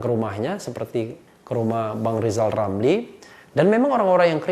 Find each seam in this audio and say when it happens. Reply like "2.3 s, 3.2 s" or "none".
none